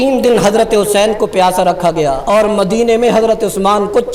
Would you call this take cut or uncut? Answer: uncut